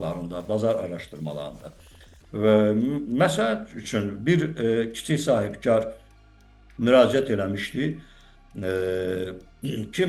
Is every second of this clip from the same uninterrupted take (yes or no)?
yes